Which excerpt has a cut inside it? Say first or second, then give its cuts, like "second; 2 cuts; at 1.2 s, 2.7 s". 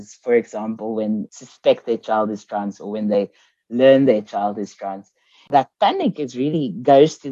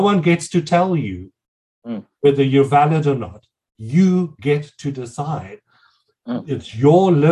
first; 2 cuts; at 1.3 s, 5.5 s